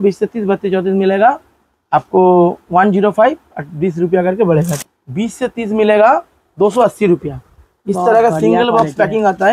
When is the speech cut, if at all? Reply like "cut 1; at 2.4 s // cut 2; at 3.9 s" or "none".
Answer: cut 1; at 4.8 s